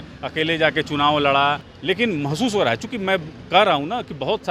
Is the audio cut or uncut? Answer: cut